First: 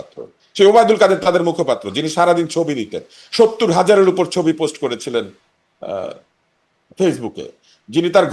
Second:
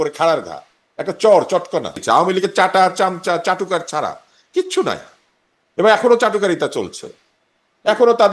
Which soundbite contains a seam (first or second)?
second